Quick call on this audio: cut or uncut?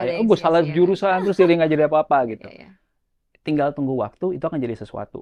uncut